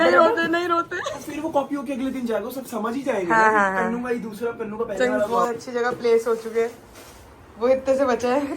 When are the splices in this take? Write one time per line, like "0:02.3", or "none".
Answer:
0:00.8
0:05.7